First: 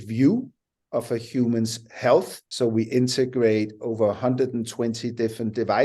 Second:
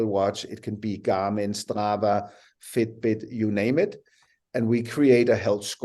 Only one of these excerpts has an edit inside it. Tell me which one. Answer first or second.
first